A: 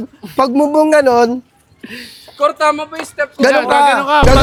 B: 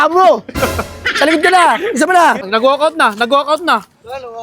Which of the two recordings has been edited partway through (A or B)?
B